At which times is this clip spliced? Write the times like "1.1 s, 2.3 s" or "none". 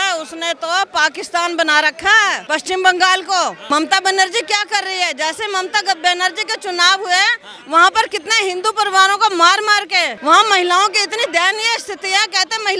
none